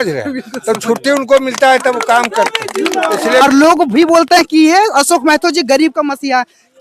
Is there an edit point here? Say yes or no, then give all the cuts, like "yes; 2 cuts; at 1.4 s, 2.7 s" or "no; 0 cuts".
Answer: yes; 1 cut; at 3.4 s